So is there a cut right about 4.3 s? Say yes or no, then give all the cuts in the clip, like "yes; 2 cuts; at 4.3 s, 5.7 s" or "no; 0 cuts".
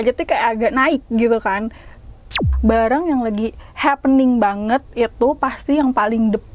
no; 1 cut; at 2.4 s